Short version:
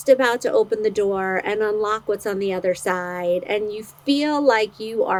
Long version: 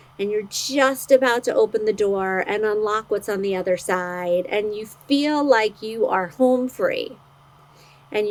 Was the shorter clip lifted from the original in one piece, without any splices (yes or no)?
yes